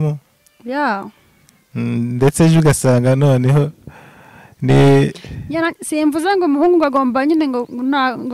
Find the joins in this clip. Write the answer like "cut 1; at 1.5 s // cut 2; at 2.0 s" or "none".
none